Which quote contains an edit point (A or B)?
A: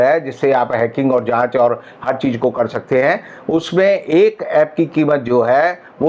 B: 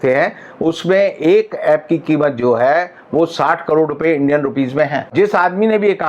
B